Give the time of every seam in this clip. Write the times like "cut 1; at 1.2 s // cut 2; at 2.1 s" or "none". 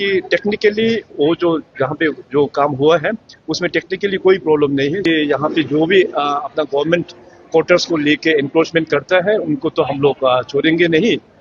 cut 1; at 5.1 s